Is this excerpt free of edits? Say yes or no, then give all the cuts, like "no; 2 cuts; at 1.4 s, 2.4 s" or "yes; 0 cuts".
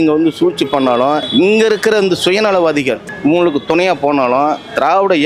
no; 2 cuts; at 1.3 s, 3.1 s